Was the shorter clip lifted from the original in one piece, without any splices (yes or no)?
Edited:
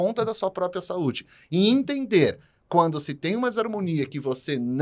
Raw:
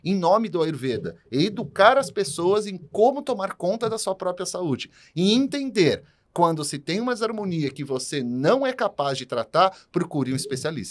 yes